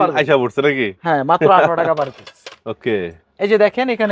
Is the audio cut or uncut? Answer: uncut